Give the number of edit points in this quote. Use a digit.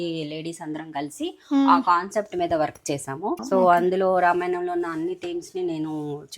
1